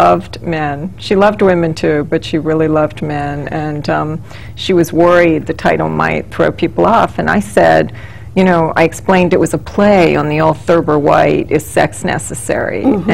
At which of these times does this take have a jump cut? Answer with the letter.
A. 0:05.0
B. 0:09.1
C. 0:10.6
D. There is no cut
B